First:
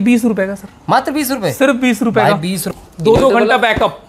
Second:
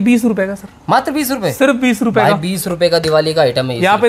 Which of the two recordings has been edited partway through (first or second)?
first